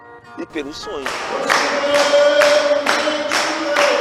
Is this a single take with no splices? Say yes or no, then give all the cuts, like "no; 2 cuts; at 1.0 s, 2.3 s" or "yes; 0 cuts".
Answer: no; 1 cut; at 1.1 s